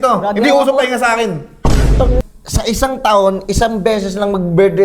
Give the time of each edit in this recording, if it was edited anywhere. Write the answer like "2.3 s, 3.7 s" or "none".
2.2 s